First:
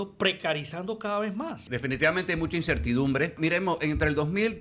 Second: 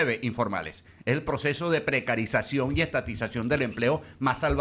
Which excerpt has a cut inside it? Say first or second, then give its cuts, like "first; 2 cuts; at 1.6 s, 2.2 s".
first; 2 cuts; at 1.7 s, 3.4 s